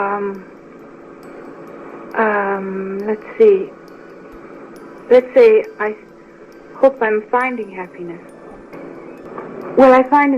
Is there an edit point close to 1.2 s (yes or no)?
yes